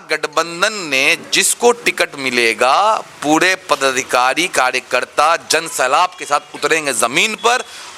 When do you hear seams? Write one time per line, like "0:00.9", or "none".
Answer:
none